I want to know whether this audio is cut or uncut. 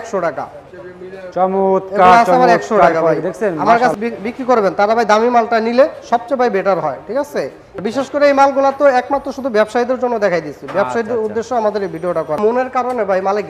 cut